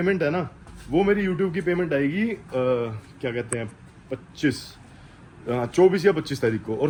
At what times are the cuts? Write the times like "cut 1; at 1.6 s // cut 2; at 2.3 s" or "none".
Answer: none

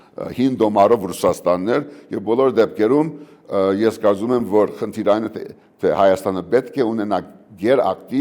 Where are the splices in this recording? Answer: none

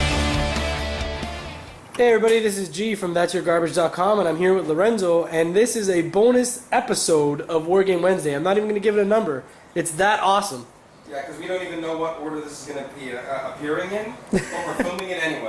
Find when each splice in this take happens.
none

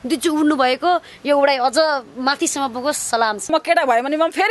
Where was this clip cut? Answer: cut 1; at 3.5 s

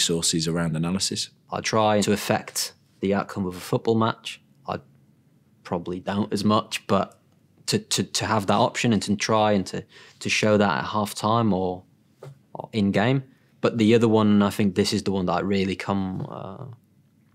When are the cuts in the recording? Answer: cut 1; at 1.3 s // cut 2; at 13.4 s

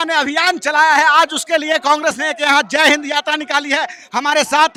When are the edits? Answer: none

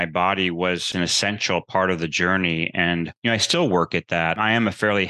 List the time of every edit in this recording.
cut 1; at 0.9 s // cut 2; at 3.1 s // cut 3; at 4.4 s

